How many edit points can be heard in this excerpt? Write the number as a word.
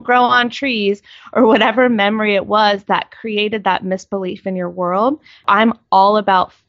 one